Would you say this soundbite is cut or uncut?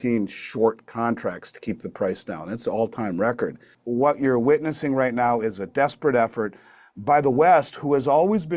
cut